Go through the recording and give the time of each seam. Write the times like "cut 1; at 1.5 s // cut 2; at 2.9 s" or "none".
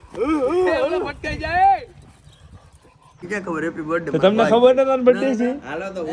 cut 1; at 3.3 s